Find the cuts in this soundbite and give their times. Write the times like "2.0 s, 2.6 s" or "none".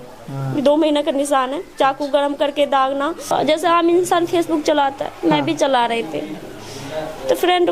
3.3 s